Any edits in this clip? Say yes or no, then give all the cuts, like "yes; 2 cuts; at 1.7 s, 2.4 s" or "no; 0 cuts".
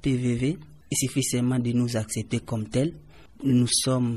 no; 0 cuts